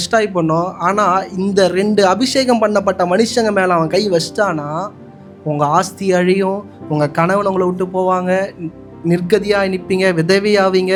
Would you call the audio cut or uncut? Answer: uncut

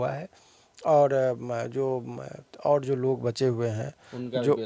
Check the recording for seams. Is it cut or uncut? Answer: uncut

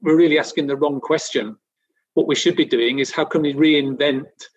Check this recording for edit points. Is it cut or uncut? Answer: uncut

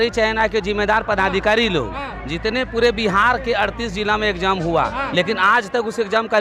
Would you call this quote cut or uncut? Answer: uncut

